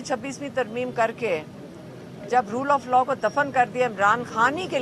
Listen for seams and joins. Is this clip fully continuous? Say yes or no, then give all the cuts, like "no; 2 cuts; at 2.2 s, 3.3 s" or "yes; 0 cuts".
yes; 0 cuts